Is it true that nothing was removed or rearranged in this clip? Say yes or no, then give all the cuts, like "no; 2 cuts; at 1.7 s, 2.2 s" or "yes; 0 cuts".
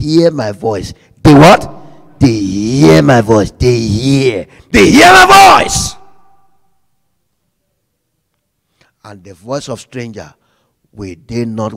no; 1 cut; at 4.5 s